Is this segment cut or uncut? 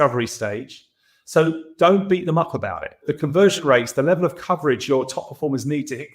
cut